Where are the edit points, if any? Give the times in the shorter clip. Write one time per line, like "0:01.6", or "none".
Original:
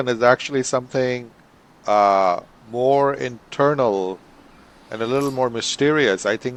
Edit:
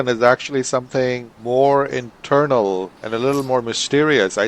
0:01.3
0:03.0